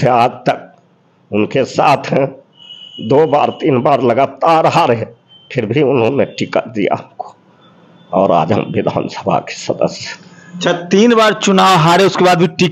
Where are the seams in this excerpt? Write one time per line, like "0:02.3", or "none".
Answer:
none

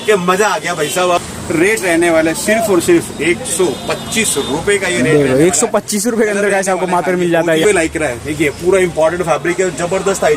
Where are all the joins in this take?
0:01.3
0:07.6

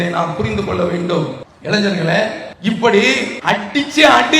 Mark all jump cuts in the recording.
0:01.5
0:02.5
0:03.3

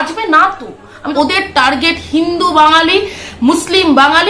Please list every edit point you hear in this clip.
0:01.0

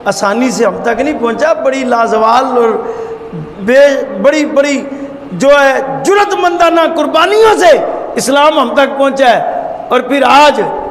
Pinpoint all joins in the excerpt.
none

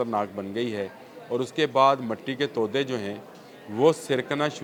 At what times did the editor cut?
none

